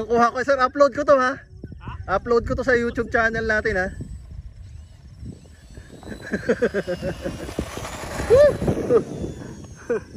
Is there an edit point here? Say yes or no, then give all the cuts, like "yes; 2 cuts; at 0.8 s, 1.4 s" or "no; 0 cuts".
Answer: no; 0 cuts